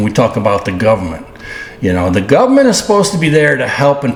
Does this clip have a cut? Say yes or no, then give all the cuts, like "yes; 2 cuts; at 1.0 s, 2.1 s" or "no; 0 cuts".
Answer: no; 0 cuts